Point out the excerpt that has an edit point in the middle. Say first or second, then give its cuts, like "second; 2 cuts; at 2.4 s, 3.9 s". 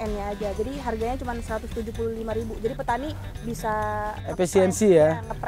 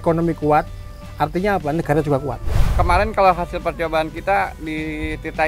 second; 1 cut; at 2.7 s